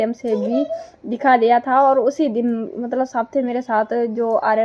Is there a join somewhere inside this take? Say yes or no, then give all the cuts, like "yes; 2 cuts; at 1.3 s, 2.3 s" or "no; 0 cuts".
no; 0 cuts